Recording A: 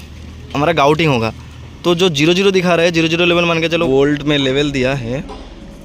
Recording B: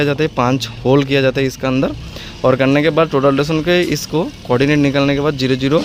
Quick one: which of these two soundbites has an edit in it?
A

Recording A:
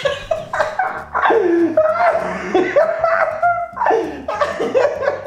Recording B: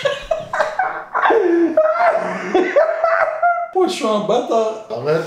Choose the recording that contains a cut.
B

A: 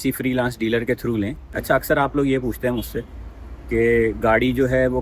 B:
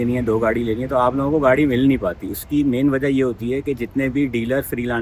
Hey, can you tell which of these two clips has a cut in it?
A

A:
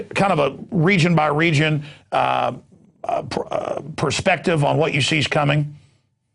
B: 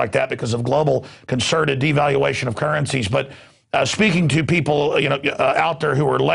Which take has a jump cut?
A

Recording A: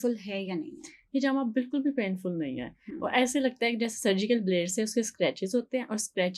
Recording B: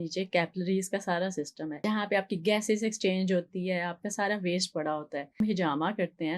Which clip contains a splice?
B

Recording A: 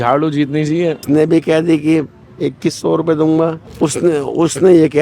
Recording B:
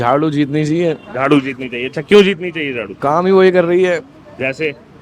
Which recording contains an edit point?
A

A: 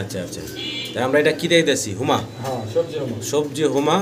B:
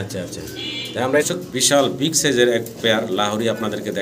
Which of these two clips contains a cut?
B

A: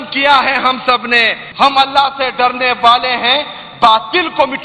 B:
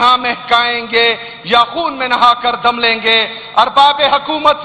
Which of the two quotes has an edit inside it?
A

